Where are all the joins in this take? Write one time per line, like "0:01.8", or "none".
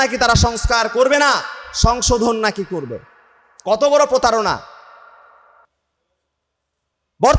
none